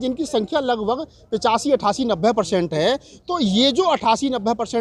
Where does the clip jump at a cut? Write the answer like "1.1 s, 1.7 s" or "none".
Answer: none

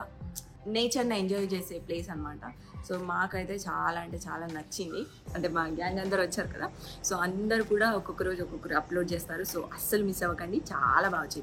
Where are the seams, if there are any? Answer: 5.2 s

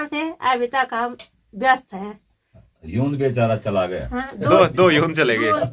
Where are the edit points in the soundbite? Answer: none

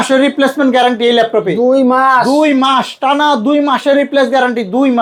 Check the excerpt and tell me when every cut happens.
none

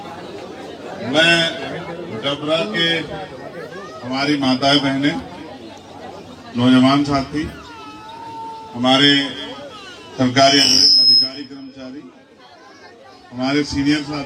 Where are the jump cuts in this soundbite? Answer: 0.9 s

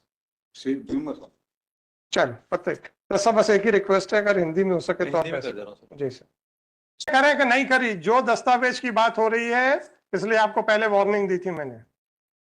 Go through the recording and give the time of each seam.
7.1 s

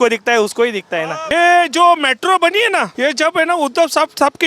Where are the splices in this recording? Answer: 1.3 s, 2.9 s

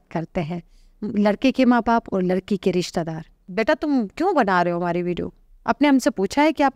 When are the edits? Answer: 3.4 s

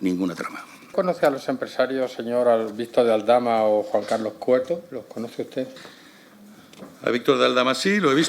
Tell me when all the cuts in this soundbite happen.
0.9 s

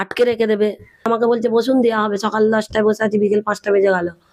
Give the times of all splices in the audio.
1.1 s

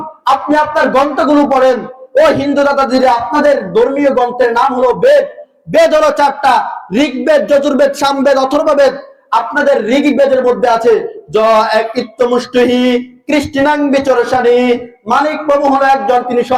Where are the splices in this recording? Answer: none

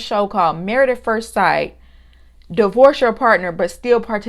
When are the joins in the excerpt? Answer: none

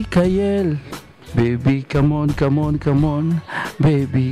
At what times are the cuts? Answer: 1.2 s

